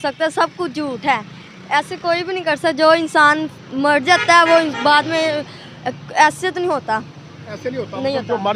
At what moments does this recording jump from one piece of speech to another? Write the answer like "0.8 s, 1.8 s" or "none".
none